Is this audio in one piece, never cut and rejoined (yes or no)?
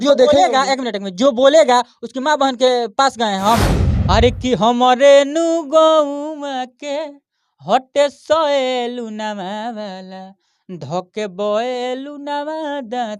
no